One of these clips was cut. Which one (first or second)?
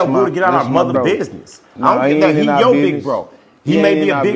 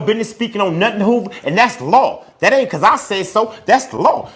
first